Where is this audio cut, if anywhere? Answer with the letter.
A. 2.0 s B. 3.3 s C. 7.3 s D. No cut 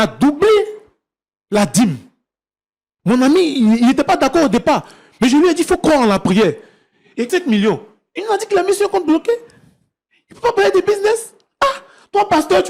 C